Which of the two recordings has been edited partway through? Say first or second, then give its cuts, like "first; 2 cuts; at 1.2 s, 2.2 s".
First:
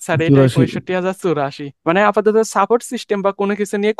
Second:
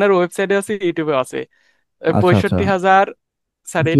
first; 1 cut; at 1.7 s